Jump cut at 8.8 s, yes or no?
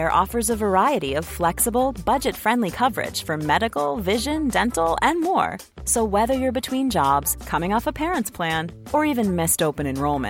no